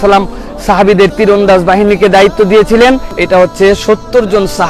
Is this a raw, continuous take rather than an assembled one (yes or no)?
no